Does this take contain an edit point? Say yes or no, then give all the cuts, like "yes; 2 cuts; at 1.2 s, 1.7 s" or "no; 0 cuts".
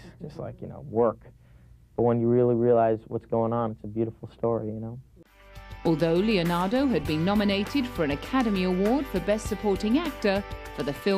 yes; 1 cut; at 4.2 s